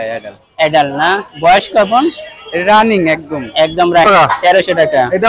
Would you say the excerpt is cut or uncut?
cut